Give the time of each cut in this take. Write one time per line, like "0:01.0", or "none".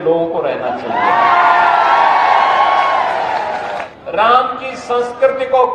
0:03.9